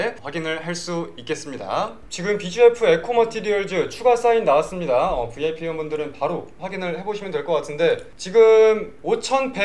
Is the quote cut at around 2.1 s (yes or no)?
yes